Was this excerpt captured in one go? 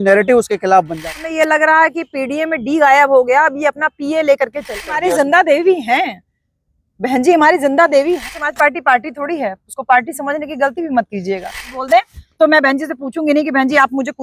no; 4 cuts; at 1.0 s, 4.8 s, 8.4 s, 11.6 s

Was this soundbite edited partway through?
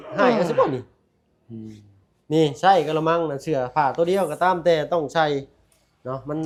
no; 0 cuts

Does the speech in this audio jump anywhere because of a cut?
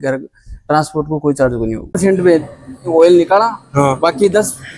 yes; 1 cut; at 2.0 s

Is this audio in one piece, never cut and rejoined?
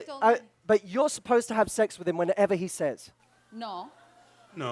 yes; 0 cuts

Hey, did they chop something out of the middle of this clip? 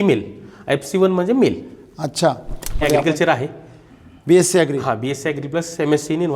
yes; 1 cut; at 2.8 s

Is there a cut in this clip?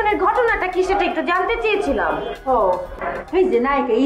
yes; 1 cut; at 2.9 s

